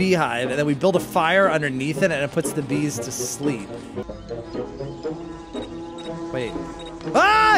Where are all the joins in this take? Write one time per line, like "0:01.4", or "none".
0:04.4